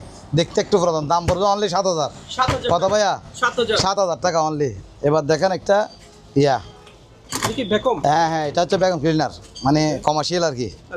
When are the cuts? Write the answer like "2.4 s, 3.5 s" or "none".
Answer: none